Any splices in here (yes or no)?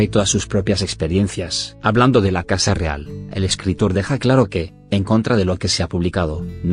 no